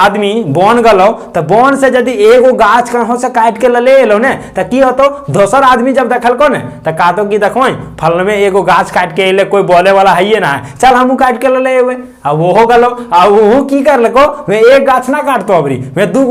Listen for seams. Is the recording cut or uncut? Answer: uncut